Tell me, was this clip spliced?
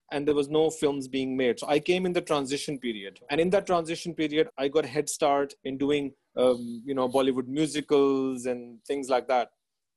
yes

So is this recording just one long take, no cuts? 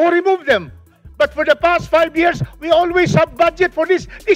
yes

